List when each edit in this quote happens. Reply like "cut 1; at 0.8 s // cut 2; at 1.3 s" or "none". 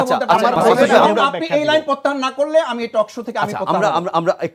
cut 1; at 1.0 s